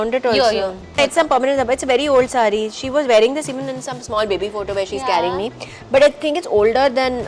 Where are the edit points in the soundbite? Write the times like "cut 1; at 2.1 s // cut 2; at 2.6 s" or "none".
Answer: cut 1; at 1.0 s